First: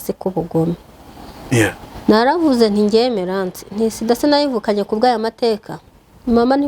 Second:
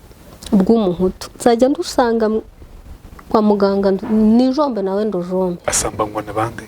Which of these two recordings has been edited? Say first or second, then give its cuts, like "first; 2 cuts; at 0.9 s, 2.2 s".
second; 1 cut; at 5.6 s